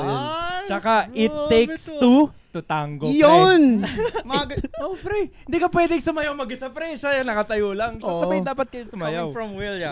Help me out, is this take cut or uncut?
uncut